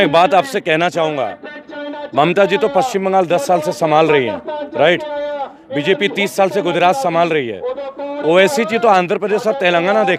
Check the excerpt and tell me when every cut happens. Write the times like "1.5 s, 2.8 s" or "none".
none

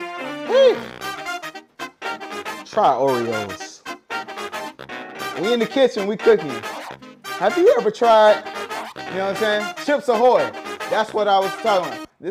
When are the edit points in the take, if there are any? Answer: none

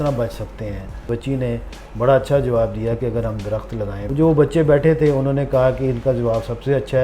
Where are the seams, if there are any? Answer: 1.0 s, 4.0 s

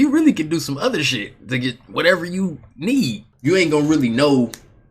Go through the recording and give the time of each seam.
3.3 s

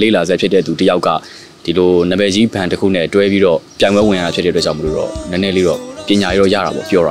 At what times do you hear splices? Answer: 5.9 s

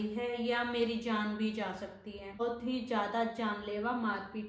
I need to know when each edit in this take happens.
2.4 s

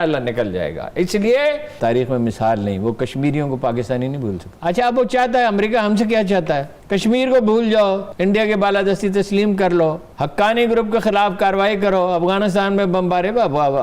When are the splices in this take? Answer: 1.7 s, 4.5 s, 6.7 s, 8.1 s, 10.1 s

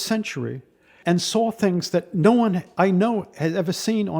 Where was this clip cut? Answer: 0.9 s, 2.7 s

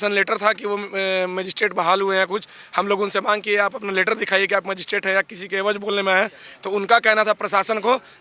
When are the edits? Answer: none

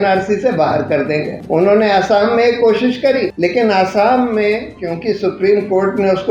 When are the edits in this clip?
1.4 s, 3.3 s

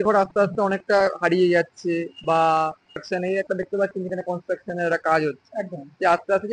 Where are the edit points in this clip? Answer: 2.8 s

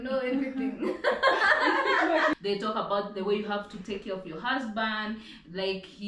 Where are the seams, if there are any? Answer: 2.4 s

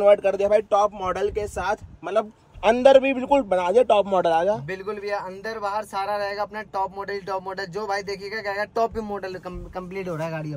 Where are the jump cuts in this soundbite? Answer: none

